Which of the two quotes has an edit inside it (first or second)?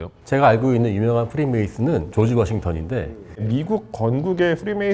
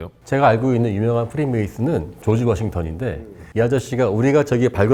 first